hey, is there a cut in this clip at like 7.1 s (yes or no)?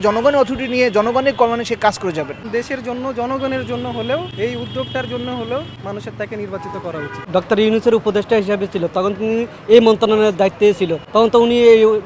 yes